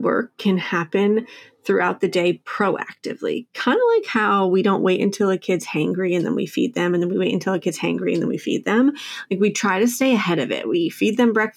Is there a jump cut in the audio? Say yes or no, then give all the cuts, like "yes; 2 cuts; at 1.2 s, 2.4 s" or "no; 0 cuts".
no; 0 cuts